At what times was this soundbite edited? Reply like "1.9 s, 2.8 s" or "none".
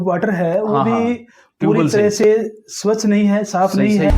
none

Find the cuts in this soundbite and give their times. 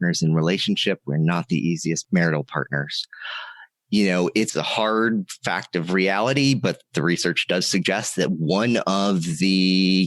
2.0 s, 4.5 s

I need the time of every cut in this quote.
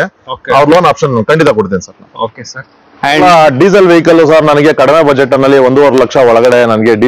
3.2 s

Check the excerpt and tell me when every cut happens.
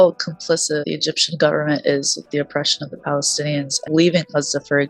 0.9 s, 3.9 s

